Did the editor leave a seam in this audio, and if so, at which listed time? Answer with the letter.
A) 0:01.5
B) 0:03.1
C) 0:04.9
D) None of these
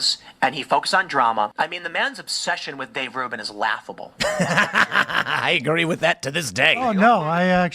A